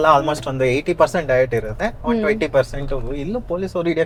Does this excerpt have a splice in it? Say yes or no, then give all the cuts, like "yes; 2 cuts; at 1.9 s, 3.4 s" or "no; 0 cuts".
no; 0 cuts